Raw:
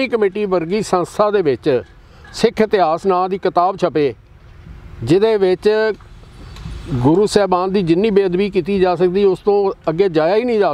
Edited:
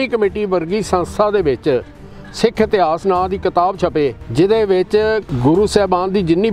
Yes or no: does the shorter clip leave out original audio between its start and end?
yes